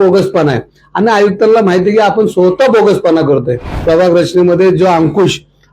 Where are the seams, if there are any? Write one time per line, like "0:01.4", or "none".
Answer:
0:03.8